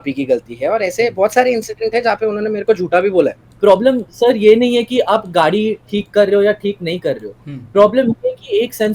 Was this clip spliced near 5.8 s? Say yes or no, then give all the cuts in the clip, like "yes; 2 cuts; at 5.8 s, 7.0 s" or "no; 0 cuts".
no; 1 cut; at 3.4 s